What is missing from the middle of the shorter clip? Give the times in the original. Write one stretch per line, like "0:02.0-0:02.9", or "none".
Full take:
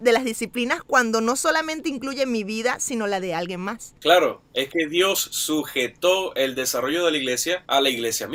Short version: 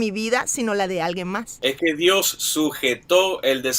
0:03.8-0:04.4